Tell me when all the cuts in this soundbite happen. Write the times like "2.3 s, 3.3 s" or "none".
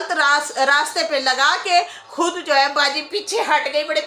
none